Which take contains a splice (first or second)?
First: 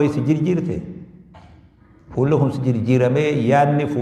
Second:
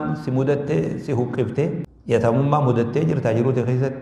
second